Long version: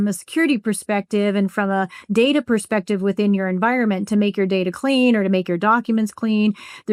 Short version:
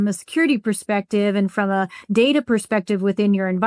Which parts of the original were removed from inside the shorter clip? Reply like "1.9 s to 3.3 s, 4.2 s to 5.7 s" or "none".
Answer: none